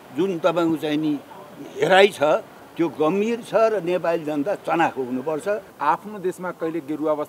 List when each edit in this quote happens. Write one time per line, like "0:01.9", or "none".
0:05.7